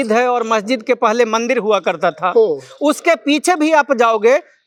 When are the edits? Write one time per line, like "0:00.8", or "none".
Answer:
none